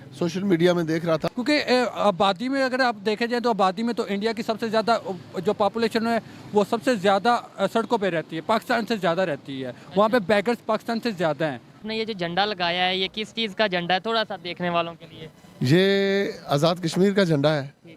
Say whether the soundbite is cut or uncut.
cut